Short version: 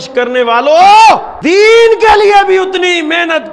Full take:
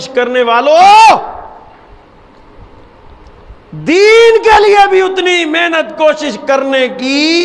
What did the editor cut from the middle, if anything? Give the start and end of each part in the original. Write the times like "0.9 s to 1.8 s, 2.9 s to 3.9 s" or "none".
1.3 s to 3.7 s